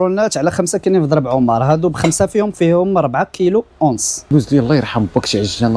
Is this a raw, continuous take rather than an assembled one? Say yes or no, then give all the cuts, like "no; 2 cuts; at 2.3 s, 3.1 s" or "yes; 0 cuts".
no; 1 cut; at 4.1 s